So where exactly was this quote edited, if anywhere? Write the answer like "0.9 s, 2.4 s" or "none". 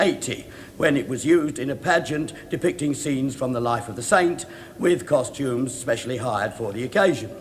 3.4 s